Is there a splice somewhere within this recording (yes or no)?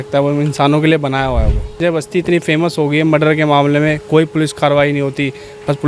yes